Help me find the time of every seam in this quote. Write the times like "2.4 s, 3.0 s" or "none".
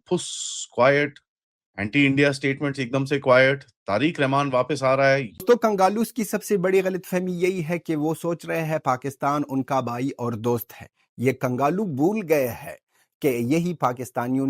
5.4 s